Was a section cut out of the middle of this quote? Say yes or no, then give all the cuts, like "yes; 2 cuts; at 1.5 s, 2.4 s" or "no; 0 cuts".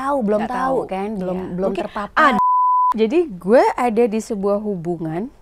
yes; 1 cut; at 2.4 s